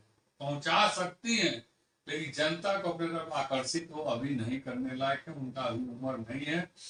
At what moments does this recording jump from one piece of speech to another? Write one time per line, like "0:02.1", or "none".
none